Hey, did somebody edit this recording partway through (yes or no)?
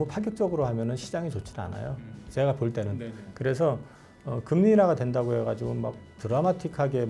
no